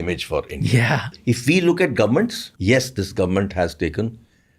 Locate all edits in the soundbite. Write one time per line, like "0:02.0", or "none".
0:01.1
0:02.5